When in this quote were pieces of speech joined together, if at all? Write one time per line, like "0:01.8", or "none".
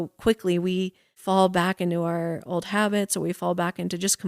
0:01.2